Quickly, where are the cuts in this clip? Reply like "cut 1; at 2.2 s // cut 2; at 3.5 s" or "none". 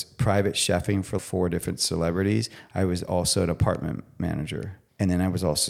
cut 1; at 1.2 s // cut 2; at 4.8 s